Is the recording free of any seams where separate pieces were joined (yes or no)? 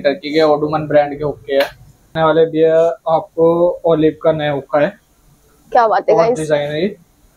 no